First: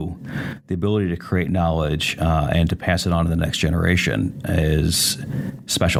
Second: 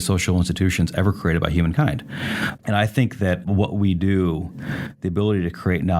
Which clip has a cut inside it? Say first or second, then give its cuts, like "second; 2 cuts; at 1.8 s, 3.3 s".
second; 2 cuts; at 2.5 s, 3.4 s